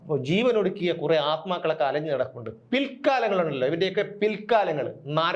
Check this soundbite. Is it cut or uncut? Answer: uncut